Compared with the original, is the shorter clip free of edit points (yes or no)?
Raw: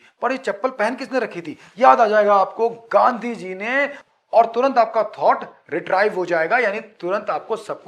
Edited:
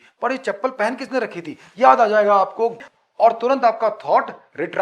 no